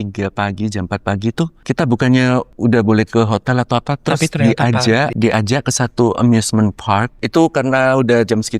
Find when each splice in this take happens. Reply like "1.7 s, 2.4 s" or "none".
1.6 s, 2.5 s, 5.1 s, 7.1 s